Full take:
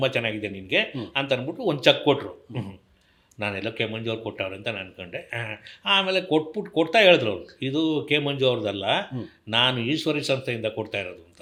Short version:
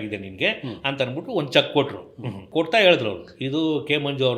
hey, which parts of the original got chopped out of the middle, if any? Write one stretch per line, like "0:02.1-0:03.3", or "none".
0:02.7-0:06.6